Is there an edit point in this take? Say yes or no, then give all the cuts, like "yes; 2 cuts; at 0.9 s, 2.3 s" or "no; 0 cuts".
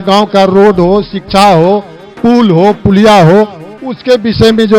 no; 0 cuts